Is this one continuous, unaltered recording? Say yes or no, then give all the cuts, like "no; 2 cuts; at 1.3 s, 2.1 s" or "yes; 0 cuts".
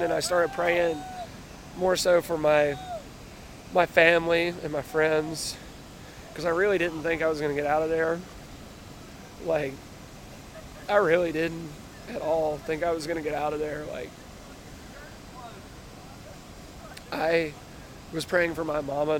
yes; 0 cuts